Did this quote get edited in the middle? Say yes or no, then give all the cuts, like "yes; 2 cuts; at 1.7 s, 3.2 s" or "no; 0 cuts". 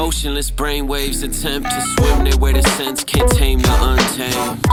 no; 0 cuts